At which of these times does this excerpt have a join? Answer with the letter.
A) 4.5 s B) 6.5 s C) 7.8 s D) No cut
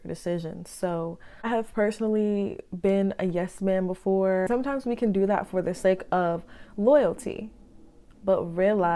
A